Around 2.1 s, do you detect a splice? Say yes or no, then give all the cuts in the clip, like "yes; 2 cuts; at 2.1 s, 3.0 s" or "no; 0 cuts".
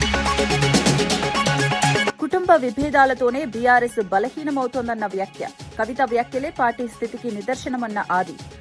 yes; 1 cut; at 2.1 s